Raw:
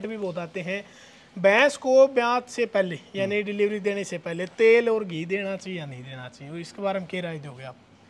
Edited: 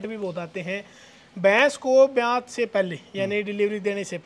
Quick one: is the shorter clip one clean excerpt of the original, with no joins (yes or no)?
yes